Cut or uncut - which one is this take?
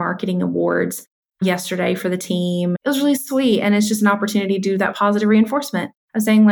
cut